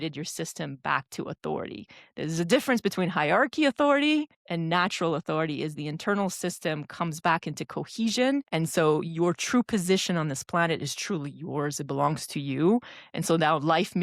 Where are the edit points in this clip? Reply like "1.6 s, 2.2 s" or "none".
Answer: 4.4 s, 8.5 s